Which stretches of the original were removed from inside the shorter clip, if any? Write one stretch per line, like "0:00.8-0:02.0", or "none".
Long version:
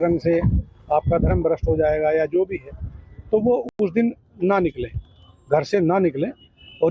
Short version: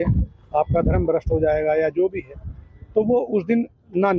0:03.6-0:03.7